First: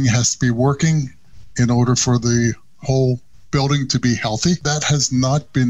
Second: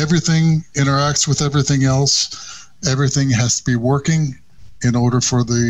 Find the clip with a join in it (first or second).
first